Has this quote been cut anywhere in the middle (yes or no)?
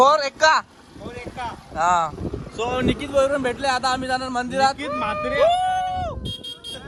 no